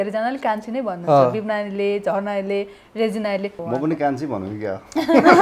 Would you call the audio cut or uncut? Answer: cut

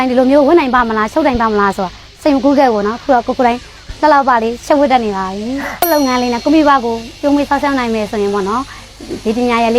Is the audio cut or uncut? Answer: cut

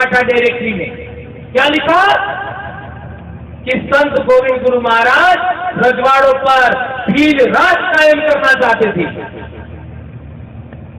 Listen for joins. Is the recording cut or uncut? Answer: uncut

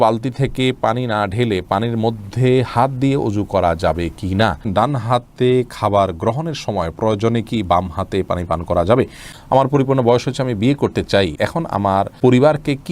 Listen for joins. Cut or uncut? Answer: cut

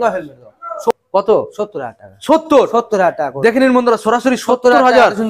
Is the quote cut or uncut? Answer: cut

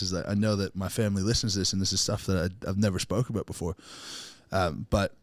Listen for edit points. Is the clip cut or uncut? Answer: uncut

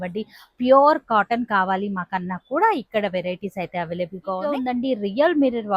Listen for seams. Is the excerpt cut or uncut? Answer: cut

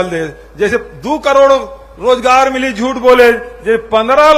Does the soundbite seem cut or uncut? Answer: uncut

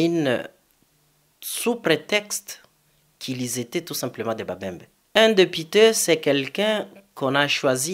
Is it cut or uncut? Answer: cut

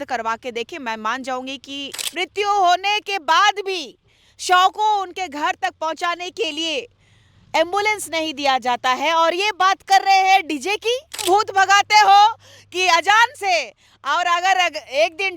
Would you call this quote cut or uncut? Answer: cut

